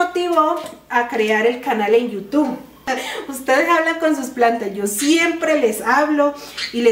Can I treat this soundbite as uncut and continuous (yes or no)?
no